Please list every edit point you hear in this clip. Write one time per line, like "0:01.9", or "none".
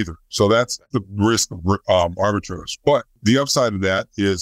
0:01.0
0:03.2